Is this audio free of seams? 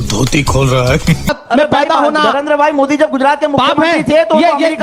no; 1 cut; at 1.3 s

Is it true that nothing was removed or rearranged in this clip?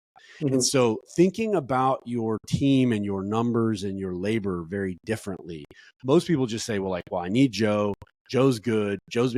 yes; 0 cuts

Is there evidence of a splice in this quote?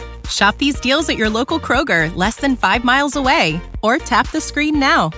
no; 0 cuts

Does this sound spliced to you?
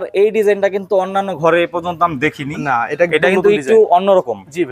no; 0 cuts

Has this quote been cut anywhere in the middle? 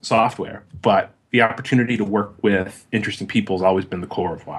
no; 0 cuts

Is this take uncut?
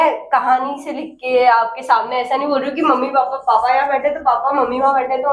yes; 0 cuts

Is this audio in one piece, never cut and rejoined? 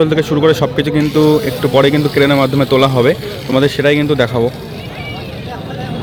yes; 0 cuts

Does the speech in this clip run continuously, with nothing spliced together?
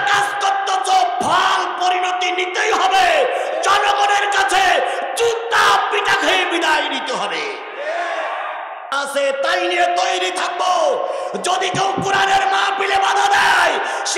no; 1 cut; at 8.8 s

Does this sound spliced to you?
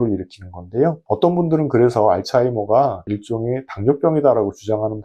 no; 0 cuts

